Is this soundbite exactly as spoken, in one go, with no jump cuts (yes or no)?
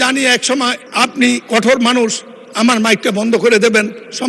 yes